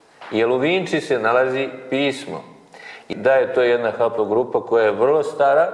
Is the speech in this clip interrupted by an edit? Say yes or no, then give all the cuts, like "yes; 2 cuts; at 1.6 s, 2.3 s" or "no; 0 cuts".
yes; 1 cut; at 3.1 s